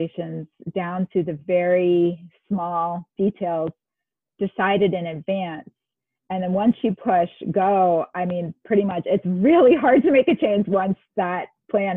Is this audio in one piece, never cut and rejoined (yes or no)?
yes